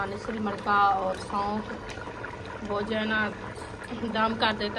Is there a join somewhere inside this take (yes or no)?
no